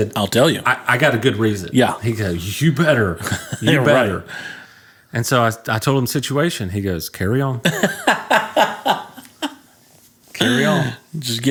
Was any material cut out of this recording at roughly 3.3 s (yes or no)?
no